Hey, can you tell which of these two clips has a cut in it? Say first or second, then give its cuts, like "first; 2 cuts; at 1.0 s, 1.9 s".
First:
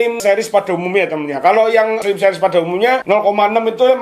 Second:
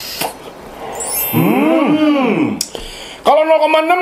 first; 1 cut; at 3.0 s